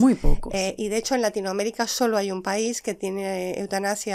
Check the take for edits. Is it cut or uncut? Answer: uncut